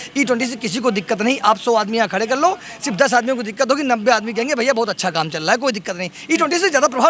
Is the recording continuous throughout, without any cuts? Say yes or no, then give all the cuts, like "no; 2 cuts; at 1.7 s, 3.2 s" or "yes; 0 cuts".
yes; 0 cuts